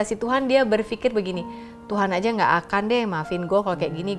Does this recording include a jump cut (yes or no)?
no